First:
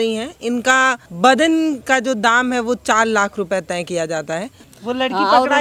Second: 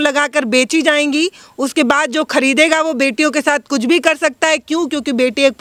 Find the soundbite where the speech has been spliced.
first; 2 cuts; at 1.1 s, 4.6 s

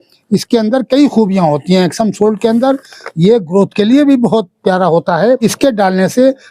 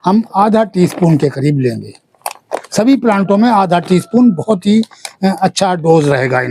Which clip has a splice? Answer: first; 1 cut; at 5.4 s

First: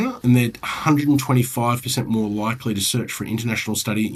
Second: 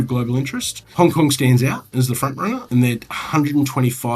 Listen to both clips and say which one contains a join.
second; 1 cut; at 0.9 s

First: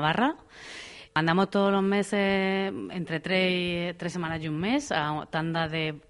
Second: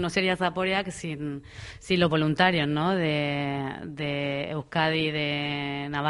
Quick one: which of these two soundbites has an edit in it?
first; 1 cut; at 1.1 s

